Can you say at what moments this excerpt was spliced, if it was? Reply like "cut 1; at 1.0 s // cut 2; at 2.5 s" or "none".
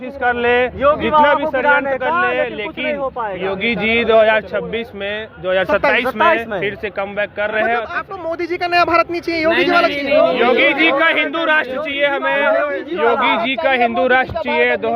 cut 1; at 7.9 s